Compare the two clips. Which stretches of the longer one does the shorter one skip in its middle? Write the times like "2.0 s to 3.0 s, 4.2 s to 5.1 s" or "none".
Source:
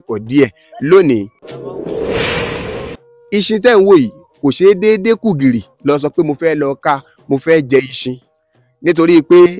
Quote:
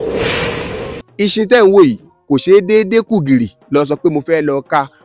2.9 s to 3.1 s